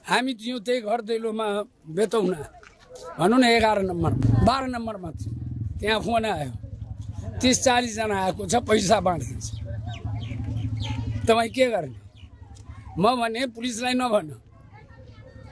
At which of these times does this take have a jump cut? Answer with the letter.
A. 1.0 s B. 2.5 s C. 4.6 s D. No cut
C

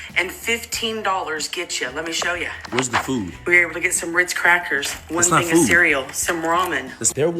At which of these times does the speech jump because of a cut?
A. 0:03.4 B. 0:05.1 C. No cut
A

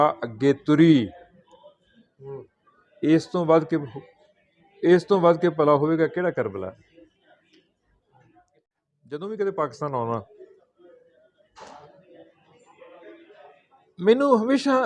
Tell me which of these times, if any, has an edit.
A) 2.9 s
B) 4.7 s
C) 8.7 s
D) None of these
C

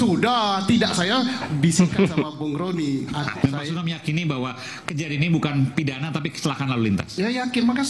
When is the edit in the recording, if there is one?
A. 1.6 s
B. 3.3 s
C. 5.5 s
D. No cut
B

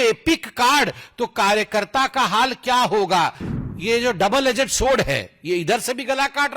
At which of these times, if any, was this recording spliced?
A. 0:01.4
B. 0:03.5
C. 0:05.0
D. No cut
B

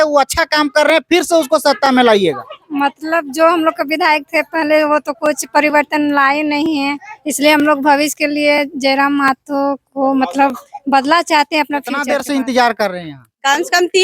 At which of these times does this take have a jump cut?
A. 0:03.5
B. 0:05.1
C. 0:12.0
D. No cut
C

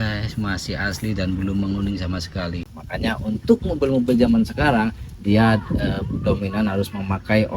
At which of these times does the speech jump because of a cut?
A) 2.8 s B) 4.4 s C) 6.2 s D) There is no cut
A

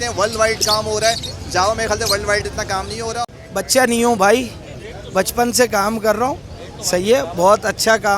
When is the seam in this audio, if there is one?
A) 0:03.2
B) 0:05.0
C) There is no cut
A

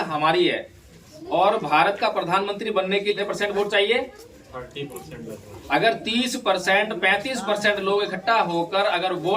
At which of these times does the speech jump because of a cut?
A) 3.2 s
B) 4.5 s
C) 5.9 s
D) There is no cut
A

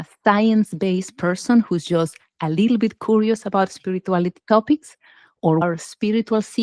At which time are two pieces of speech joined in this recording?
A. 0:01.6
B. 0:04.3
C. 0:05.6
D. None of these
C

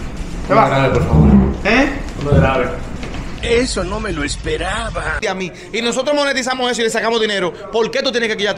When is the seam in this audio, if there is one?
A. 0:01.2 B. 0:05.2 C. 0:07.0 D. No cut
B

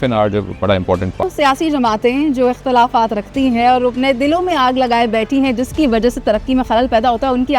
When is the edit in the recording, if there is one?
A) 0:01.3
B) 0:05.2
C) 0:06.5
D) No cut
A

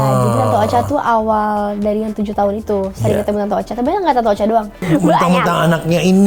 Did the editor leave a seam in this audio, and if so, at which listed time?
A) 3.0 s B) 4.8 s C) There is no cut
B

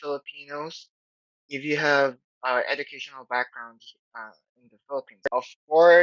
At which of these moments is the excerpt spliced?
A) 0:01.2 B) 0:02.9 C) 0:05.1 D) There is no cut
C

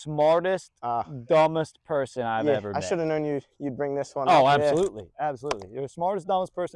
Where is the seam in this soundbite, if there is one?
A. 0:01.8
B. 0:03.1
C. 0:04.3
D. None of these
D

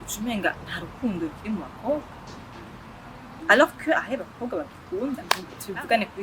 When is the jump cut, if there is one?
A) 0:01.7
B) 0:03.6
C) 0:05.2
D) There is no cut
C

